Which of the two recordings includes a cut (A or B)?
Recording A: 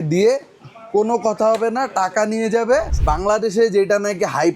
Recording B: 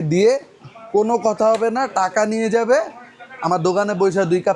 A